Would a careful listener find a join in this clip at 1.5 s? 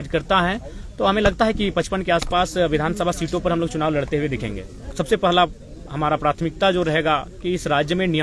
no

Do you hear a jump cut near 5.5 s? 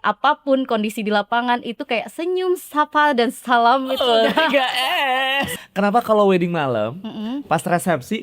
yes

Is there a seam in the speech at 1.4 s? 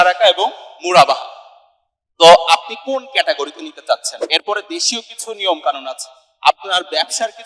no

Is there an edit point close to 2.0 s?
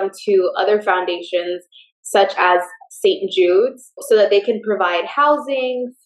no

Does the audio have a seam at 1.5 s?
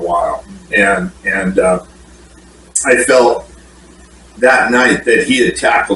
no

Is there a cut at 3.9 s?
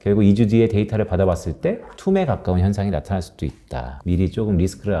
yes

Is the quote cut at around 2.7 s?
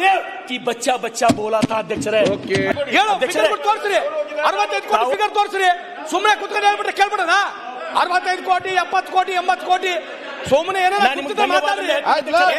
yes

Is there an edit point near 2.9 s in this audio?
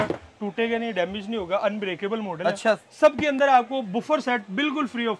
yes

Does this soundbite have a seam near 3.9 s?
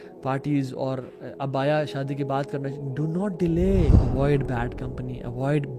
yes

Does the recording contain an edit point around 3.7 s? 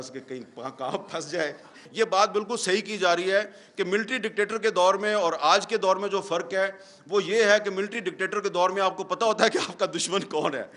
no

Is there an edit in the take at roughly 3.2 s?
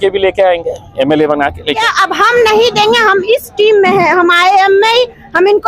no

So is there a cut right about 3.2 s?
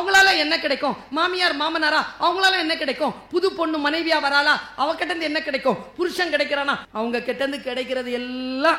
no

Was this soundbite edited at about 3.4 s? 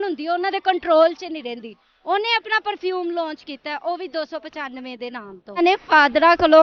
no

